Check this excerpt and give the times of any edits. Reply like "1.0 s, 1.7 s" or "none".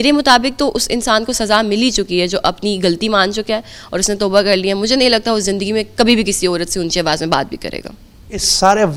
none